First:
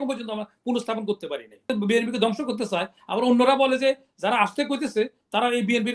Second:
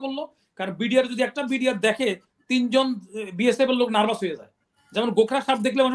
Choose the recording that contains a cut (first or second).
first